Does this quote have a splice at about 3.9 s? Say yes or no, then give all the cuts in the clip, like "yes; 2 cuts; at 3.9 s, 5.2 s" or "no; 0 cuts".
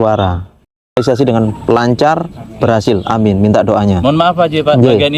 no; 1 cut; at 1.0 s